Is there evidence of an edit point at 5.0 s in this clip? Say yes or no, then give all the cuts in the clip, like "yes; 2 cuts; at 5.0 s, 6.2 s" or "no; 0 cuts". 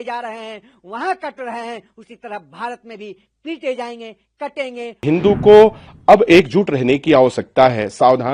yes; 1 cut; at 5.0 s